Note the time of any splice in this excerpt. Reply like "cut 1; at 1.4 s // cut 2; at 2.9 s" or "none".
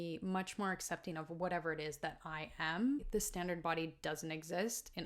cut 1; at 3.1 s